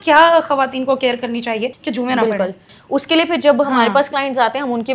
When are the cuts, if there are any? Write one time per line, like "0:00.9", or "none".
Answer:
0:01.8
0:02.7